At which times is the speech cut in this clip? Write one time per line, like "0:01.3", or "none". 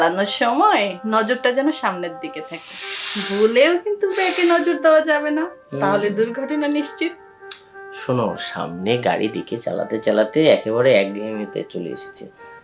none